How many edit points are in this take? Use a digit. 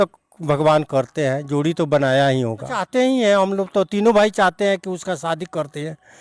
1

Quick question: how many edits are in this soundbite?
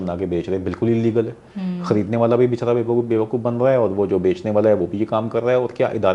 0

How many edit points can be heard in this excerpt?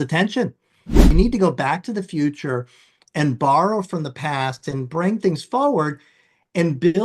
1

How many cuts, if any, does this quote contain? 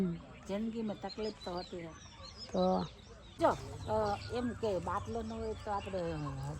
1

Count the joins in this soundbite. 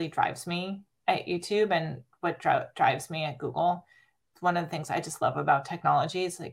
1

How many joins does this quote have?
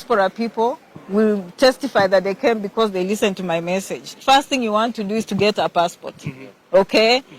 1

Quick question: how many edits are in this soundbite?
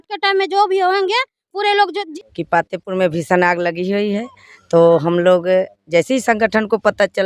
1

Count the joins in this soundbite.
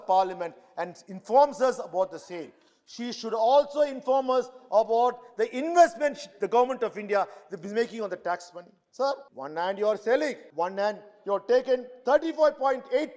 2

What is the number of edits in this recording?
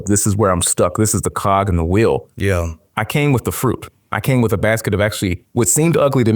2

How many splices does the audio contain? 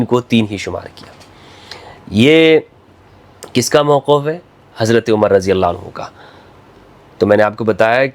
0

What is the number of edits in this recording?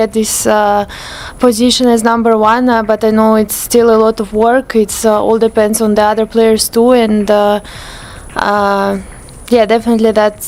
0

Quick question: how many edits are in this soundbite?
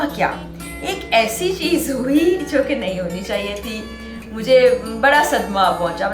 0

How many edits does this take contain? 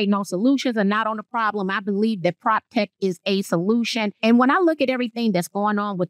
1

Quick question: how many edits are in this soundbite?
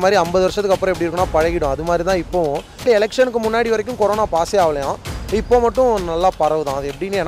1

